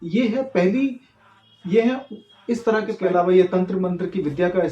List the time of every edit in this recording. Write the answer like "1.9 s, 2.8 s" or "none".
2.9 s